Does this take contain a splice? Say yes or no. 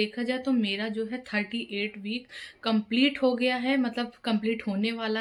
no